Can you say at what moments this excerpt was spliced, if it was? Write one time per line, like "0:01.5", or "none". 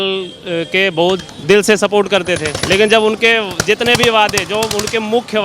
0:01.3
0:02.5